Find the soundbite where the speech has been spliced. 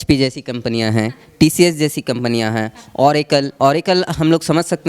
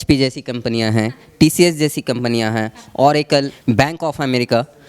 second; 1 cut; at 3.5 s

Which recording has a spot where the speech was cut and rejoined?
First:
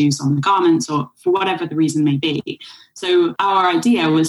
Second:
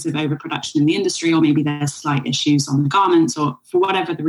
first; 1 cut; at 3.3 s

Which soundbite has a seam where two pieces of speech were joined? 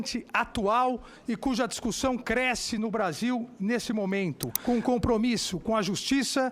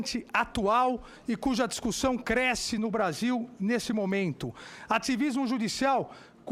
first; 1 cut; at 4.5 s

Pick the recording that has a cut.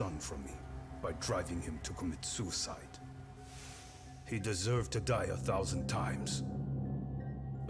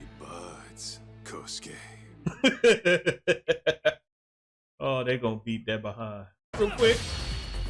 second; 1 cut; at 6.5 s

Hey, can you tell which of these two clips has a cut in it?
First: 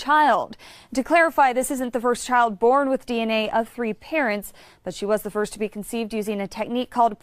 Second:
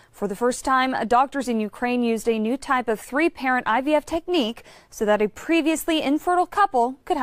first; 1 cut; at 3.4 s

